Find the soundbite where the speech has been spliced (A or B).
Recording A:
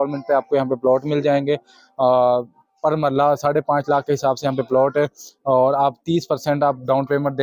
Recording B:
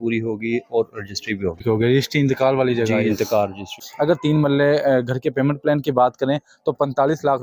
B